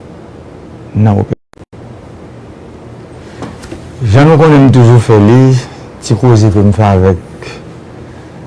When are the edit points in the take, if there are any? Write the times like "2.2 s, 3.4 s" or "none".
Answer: 1.3 s

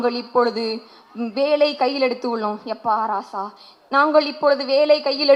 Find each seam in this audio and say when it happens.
none

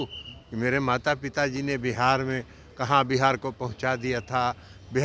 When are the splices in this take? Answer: none

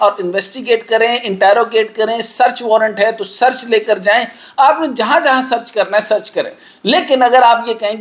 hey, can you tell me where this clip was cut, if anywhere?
none

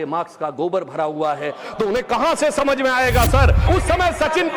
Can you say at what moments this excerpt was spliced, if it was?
3.6 s

